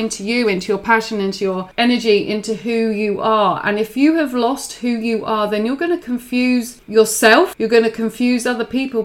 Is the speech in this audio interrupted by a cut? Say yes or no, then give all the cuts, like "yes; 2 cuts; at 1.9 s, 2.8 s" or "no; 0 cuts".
yes; 3 cuts; at 1.7 s, 6.8 s, 7.6 s